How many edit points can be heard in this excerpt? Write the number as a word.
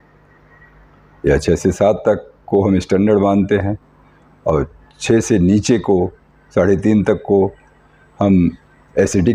zero